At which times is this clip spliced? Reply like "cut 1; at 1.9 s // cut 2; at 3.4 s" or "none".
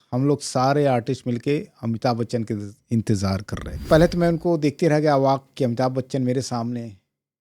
cut 1; at 3.9 s